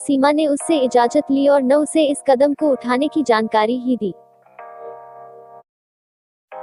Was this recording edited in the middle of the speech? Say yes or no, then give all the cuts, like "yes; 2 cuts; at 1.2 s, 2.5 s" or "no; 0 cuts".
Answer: yes; 2 cuts; at 4.3 s, 5.7 s